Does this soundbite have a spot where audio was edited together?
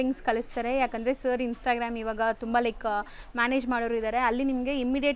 no; 0 cuts

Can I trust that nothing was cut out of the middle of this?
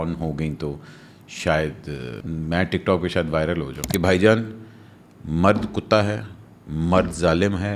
no; 2 cuts; at 2.2 s, 3.8 s

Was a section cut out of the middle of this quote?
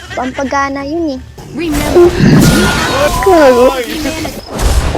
yes; 1 cut; at 1.4 s

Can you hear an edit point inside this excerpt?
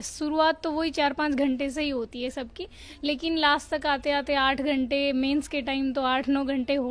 no; 0 cuts

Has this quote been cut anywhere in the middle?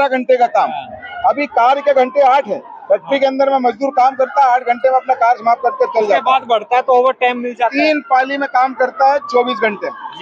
no; 0 cuts

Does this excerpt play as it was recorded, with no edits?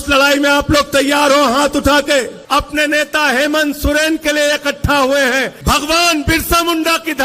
no; 2 cuts; at 2.4 s, 5.5 s

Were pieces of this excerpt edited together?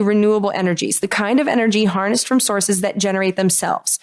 no; 0 cuts

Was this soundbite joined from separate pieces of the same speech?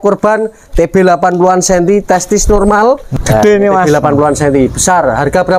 yes; 1 cut; at 3.1 s

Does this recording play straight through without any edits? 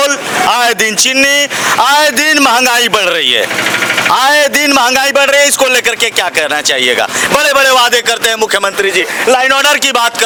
yes; 0 cuts

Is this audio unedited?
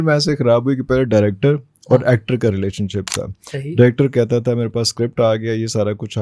yes; 0 cuts

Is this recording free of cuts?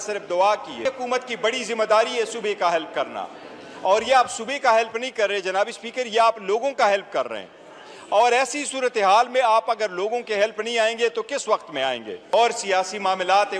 no; 2 cuts; at 0.8 s, 12.3 s

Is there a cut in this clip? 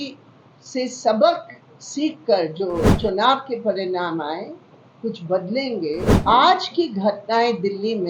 yes; 2 cuts; at 2.9 s, 6.1 s

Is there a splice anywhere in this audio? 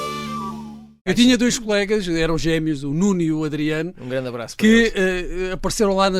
yes; 1 cut; at 1.0 s

